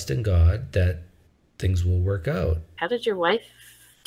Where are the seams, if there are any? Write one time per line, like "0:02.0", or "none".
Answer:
0:02.7